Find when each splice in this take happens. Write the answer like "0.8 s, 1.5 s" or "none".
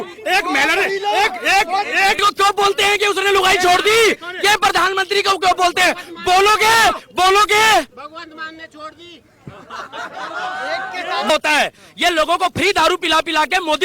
2.2 s, 11.3 s